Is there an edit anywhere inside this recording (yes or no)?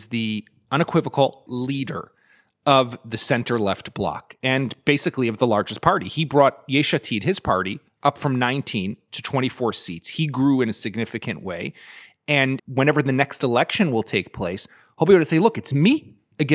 yes